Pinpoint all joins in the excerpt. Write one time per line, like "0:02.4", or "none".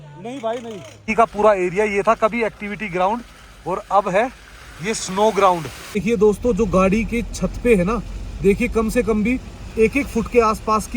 0:00.9
0:05.8